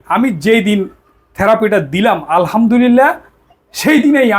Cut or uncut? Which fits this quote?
uncut